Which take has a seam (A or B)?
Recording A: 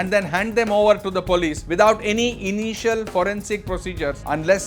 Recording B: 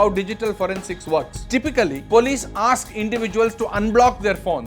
B